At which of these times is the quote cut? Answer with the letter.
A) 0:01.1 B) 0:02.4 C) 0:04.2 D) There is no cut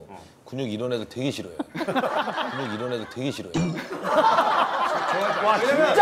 B